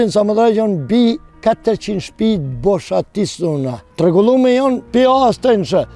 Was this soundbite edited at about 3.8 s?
yes; 3 cuts; at 1.3 s, 3.8 s, 4.8 s

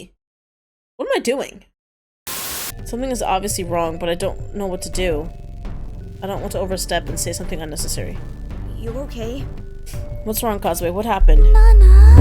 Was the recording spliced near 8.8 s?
no; 1 cut; at 2.2 s

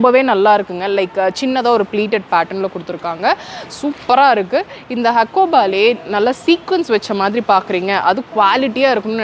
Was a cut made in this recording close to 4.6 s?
no; 0 cuts

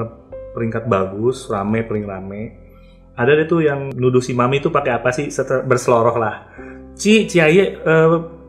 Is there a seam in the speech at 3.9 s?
yes; 1 cut; at 3.9 s

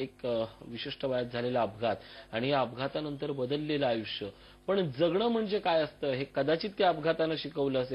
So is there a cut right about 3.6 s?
yes; 1 cut; at 3.6 s

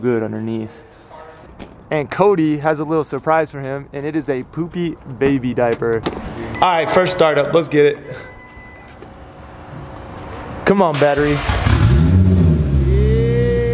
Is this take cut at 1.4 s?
yes; 2 cuts; at 1.4 s, 6.1 s

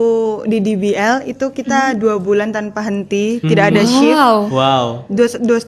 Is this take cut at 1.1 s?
no; 0 cuts

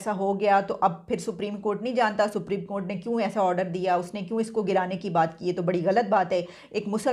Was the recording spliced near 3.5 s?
no; 0 cuts

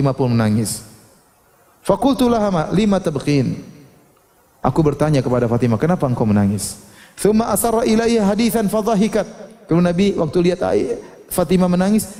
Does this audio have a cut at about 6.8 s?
no; 0 cuts

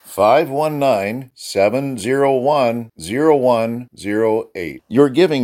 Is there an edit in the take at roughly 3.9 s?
no; 0 cuts

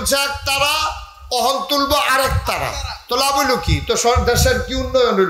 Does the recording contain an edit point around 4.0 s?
no; 0 cuts

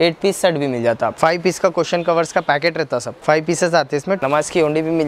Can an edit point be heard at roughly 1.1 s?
yes; 3 cuts; at 1.1 s, 3.1 s, 4.2 s

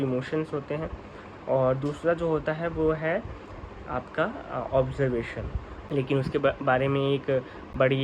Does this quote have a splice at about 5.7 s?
yes; 1 cut; at 5.7 s

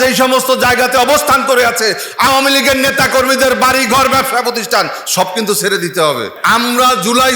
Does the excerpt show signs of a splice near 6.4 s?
yes; 1 cut; at 6.4 s

